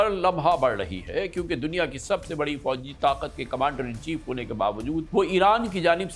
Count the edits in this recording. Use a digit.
1